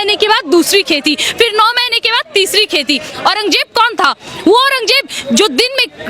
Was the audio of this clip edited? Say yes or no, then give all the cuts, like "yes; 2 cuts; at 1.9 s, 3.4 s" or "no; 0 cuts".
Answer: yes; 1 cut; at 3.1 s